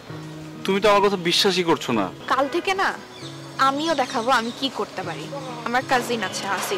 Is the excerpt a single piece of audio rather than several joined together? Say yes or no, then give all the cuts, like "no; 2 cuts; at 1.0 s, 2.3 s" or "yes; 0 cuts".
no; 2 cuts; at 2.2 s, 5.7 s